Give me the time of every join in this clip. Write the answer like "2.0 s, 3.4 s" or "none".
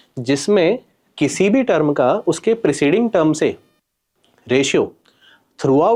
none